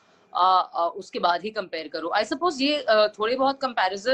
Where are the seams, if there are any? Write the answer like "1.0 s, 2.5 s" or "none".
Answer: none